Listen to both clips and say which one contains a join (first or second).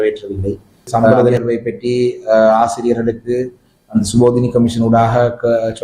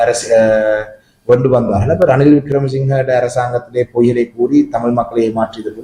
first